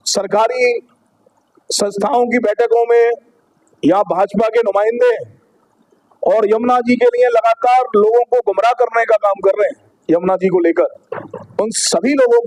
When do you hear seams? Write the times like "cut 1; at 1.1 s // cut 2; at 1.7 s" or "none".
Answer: none